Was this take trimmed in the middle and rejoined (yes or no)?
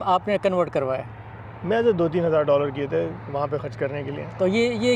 no